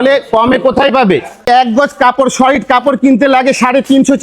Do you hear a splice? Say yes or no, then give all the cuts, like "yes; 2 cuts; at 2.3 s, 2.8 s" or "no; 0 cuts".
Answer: yes; 1 cut; at 1.4 s